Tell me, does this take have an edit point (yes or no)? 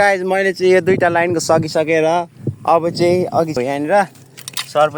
yes